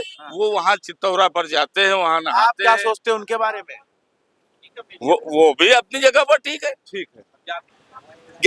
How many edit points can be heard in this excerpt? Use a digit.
0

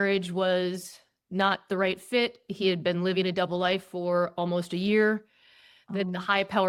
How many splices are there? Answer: 0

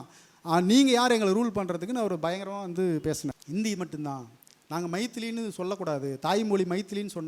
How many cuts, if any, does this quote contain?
1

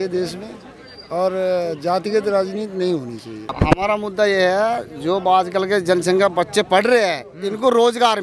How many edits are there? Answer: 1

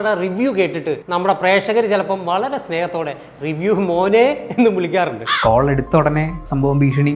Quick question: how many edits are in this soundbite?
0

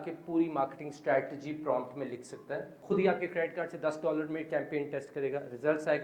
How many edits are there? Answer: 1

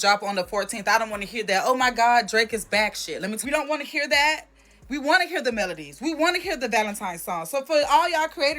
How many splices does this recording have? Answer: 1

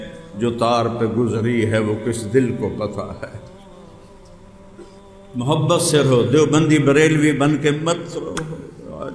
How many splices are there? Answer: 1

